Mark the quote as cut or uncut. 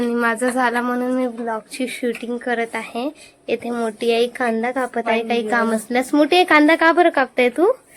uncut